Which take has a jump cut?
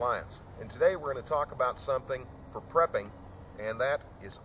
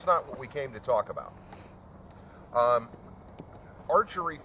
second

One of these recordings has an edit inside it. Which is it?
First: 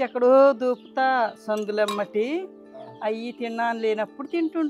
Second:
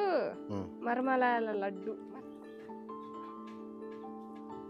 second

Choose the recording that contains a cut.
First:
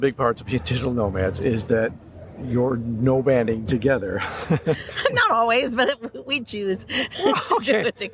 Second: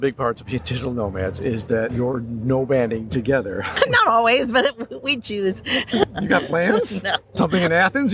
second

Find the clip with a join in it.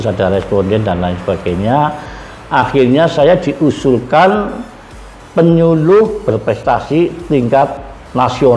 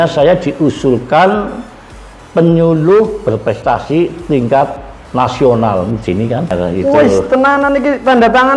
second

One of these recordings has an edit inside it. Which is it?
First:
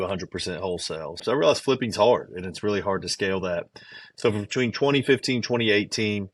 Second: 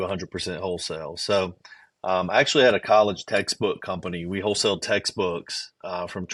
first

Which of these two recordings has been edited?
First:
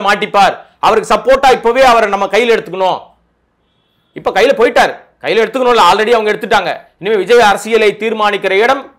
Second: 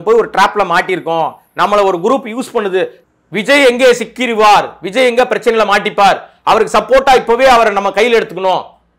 second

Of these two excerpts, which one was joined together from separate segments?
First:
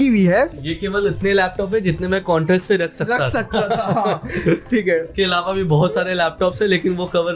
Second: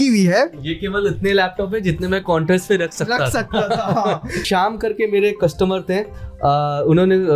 second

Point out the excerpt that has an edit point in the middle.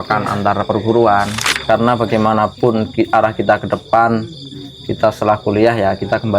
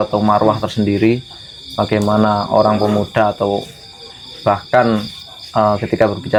first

